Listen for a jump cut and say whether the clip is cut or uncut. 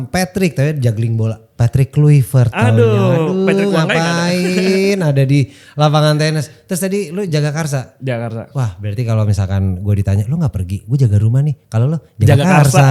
uncut